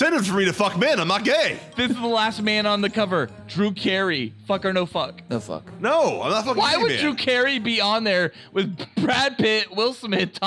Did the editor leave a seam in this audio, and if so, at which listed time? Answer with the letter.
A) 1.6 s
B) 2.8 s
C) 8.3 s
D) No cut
A